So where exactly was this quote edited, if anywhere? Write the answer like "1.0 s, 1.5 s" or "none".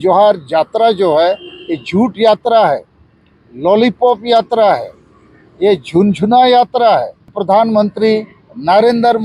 7.4 s